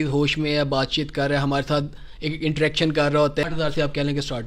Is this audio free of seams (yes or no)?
no